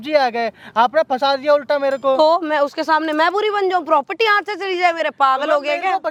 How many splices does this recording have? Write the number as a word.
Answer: zero